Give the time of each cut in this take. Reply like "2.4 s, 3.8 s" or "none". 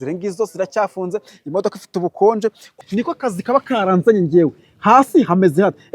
2.7 s